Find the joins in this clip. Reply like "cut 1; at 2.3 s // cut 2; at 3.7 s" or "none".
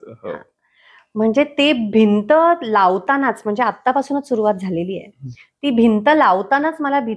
none

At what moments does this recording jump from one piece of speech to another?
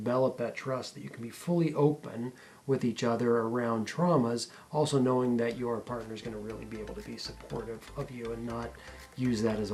none

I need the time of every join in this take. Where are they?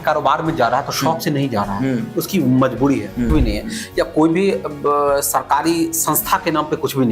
cut 1; at 3.3 s

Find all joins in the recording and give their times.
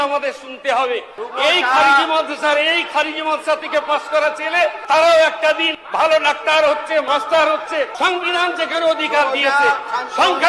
cut 1; at 1.2 s // cut 2; at 4.8 s // cut 3; at 5.8 s // cut 4; at 7.0 s // cut 5; at 7.9 s

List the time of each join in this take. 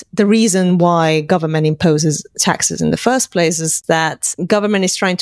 cut 1; at 3.8 s

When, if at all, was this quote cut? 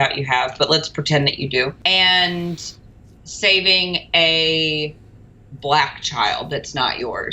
cut 1; at 1.8 s

